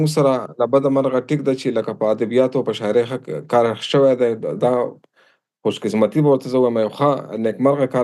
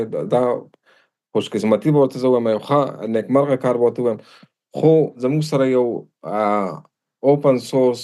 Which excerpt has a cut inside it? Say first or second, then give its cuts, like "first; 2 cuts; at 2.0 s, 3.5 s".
second; 1 cut; at 5.2 s